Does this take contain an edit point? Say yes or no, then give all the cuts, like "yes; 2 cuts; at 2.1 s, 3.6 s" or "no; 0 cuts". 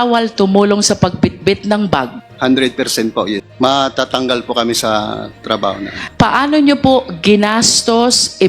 yes; 3 cuts; at 2.2 s, 3.4 s, 5.9 s